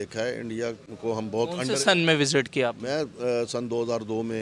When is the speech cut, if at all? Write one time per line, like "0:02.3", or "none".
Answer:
none